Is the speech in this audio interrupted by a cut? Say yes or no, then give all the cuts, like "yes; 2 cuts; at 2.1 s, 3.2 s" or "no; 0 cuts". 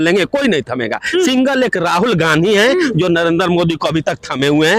no; 0 cuts